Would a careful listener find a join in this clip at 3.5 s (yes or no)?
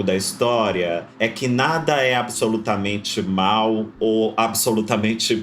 no